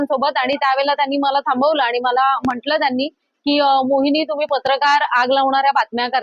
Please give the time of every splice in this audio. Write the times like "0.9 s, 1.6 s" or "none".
none